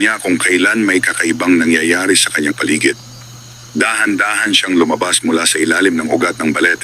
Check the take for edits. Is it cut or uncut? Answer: cut